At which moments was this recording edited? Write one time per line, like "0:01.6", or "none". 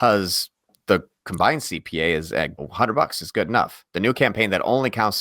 0:02.6